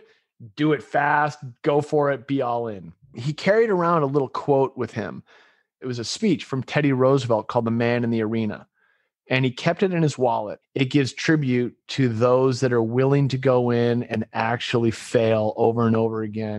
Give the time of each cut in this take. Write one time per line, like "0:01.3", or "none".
0:03.2
0:05.8
0:10.6